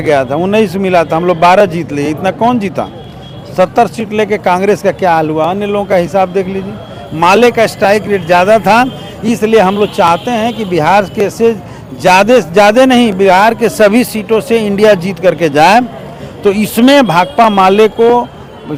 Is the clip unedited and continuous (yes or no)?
yes